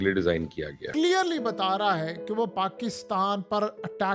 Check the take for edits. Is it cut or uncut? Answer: cut